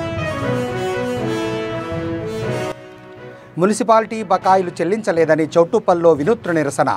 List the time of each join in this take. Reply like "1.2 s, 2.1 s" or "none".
2.7 s